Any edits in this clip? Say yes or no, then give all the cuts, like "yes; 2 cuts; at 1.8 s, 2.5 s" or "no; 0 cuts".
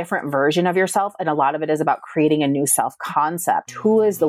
no; 0 cuts